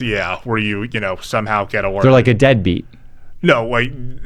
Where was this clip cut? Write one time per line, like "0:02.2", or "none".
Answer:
none